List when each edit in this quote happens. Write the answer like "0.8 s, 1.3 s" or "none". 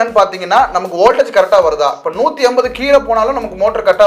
none